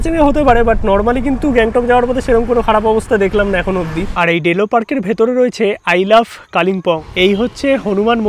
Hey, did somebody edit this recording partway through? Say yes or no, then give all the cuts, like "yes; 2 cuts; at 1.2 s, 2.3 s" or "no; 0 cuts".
yes; 2 cuts; at 4.1 s, 7.0 s